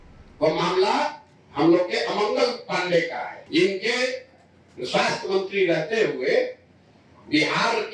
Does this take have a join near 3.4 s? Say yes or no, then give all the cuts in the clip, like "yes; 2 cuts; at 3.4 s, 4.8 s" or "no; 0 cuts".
yes; 1 cut; at 3.4 s